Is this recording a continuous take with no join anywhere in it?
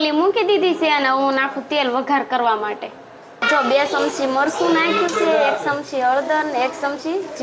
no; 1 cut; at 3.5 s

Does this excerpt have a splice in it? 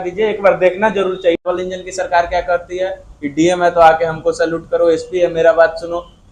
yes; 1 cut; at 1.5 s

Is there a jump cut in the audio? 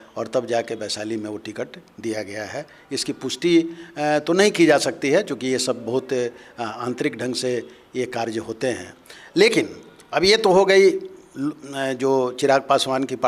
no; 0 cuts

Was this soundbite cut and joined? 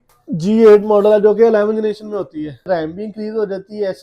yes; 1 cut; at 2.7 s

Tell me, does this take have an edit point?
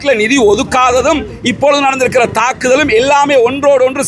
no; 0 cuts

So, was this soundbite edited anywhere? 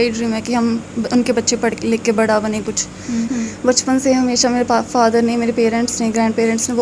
yes; 1 cut; at 3.3 s

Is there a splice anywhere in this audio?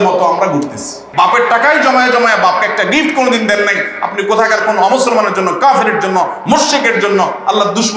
yes; 1 cut; at 1.0 s

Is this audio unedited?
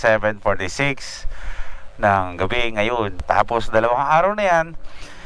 no; 1 cut; at 3.2 s

